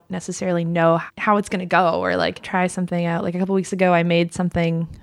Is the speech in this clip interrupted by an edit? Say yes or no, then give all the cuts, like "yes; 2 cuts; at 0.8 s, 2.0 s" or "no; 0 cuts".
yes; 2 cuts; at 1.1 s, 2.4 s